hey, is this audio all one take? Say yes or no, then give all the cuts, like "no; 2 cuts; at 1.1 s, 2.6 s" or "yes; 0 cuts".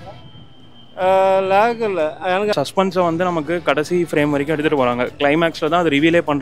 no; 1 cut; at 2.5 s